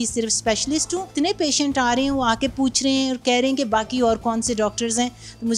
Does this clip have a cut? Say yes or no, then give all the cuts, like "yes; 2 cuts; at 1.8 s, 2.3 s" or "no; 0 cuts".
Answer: yes; 1 cut; at 1.1 s